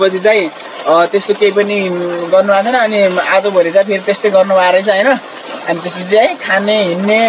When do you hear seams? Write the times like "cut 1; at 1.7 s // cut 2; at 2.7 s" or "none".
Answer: none